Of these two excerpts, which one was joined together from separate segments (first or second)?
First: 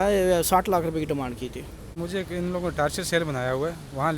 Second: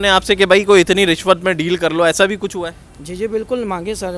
first